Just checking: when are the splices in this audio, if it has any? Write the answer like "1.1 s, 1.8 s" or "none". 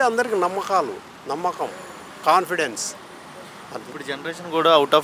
none

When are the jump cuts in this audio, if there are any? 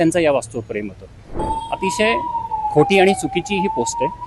1.3 s

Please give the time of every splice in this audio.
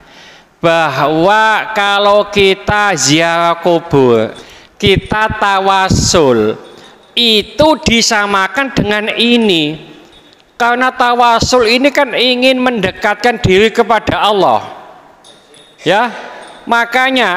4.4 s

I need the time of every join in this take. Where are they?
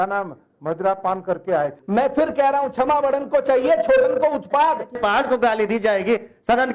1.8 s, 5.0 s

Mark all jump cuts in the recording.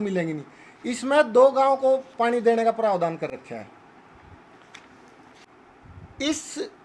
5.5 s

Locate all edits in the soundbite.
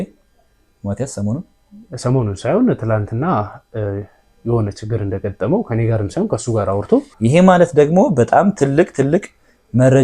7.1 s

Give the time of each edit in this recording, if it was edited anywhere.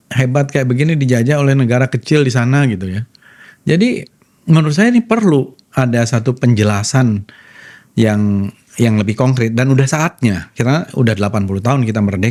none

